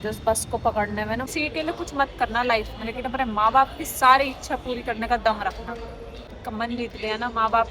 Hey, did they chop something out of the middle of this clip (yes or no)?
yes